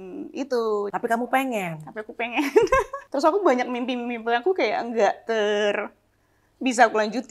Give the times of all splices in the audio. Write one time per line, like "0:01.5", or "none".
0:00.9
0:03.0